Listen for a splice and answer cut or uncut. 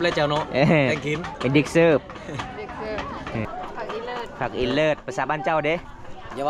cut